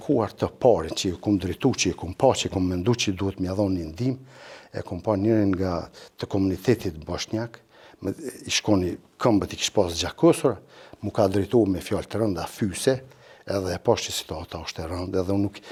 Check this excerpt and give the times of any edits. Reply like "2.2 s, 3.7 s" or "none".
none